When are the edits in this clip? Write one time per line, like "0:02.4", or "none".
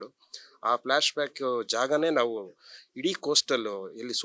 none